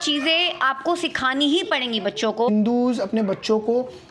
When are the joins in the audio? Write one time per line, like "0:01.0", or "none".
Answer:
0:02.5